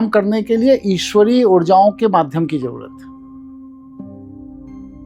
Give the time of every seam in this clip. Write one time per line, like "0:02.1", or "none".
none

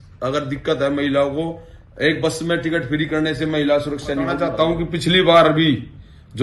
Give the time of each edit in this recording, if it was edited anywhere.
0:04.4

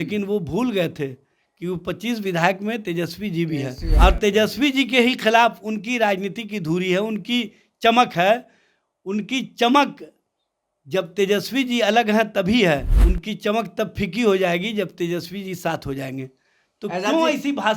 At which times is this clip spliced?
0:03.9
0:13.0

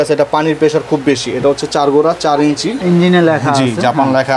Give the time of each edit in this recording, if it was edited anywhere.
0:02.8

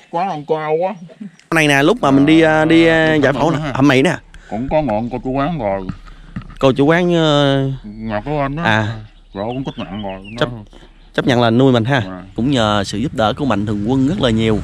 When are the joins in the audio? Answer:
0:01.5
0:12.3

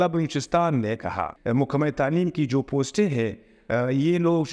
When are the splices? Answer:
0:01.2

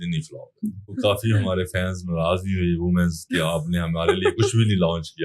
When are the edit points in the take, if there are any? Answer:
0:00.9

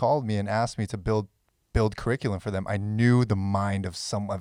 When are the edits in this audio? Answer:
none

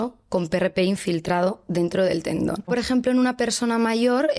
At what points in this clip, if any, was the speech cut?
0:02.7

